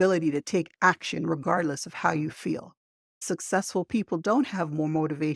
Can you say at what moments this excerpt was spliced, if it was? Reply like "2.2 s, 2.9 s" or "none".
3.2 s